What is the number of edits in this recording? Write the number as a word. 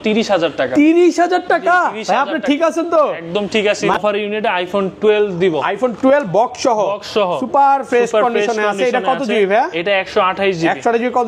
one